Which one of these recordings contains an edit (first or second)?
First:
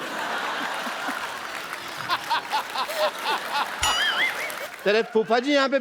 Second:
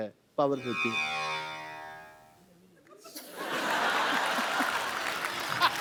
first